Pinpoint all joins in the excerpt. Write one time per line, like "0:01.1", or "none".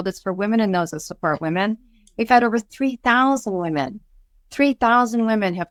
none